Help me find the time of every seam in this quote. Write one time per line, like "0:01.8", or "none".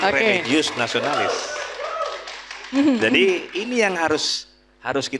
none